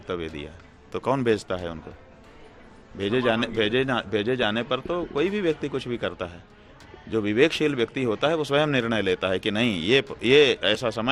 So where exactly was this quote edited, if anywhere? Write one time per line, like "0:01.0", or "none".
none